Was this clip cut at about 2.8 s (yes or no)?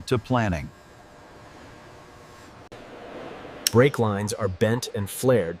yes